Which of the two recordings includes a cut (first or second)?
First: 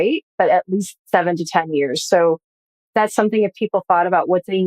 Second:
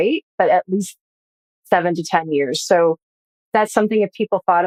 first